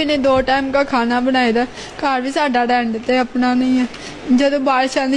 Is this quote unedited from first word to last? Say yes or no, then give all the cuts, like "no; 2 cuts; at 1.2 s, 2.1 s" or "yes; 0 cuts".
yes; 0 cuts